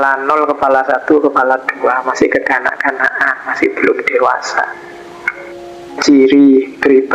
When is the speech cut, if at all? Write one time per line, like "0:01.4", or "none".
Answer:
0:06.0